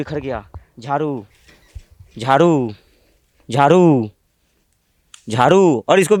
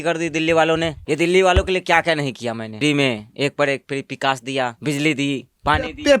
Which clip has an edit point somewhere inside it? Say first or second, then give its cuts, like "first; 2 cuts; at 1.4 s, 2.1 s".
second; 3 cuts; at 1.0 s, 2.8 s, 4.8 s